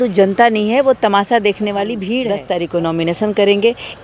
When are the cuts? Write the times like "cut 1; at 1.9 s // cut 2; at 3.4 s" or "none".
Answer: cut 1; at 2.3 s